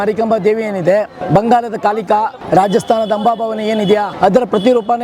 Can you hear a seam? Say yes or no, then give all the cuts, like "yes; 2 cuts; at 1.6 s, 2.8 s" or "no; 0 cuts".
yes; 3 cuts; at 1.2 s, 2.4 s, 4.1 s